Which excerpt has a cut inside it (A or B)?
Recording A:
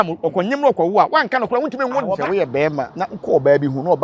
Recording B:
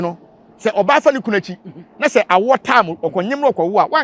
A